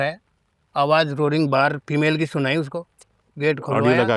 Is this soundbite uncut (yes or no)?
yes